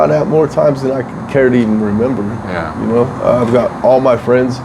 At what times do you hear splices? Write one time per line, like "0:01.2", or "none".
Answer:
none